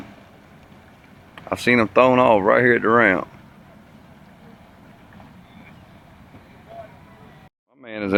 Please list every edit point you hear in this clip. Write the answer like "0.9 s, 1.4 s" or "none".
none